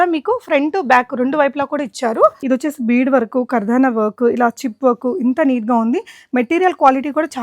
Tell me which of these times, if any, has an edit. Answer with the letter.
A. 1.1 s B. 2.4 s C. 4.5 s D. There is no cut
B